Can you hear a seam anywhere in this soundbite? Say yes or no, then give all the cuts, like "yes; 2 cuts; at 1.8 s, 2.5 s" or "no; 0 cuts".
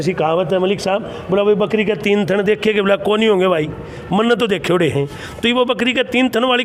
no; 0 cuts